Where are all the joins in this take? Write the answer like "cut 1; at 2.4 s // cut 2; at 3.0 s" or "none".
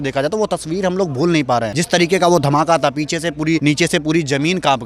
cut 1; at 1.8 s // cut 2; at 3.6 s